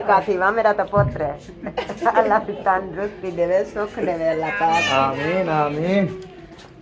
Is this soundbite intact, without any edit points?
yes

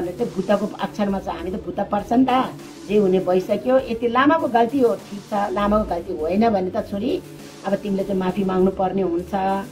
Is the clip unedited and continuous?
no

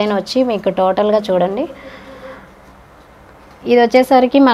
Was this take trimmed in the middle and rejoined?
no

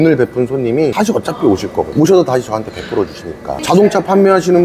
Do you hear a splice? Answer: yes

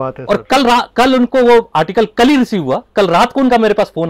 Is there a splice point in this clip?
yes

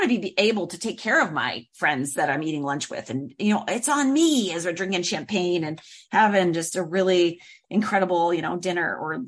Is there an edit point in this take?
no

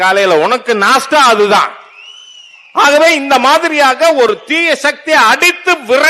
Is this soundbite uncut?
yes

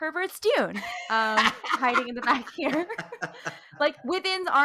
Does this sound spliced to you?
no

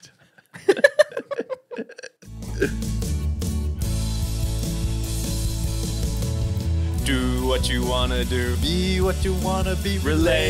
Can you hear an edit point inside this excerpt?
yes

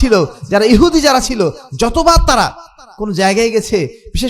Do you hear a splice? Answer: no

